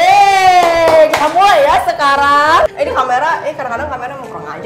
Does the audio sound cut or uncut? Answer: cut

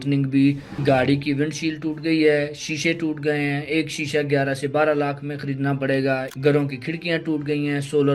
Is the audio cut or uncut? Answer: cut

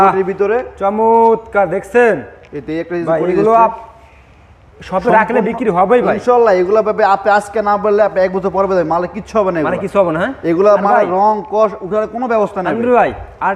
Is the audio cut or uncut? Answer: uncut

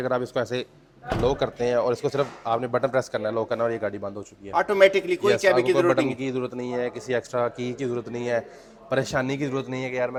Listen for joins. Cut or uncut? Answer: uncut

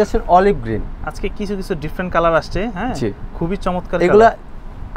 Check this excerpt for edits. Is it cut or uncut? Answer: uncut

